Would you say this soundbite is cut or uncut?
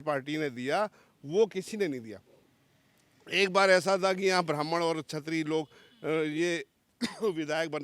uncut